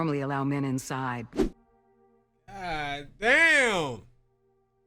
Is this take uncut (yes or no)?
no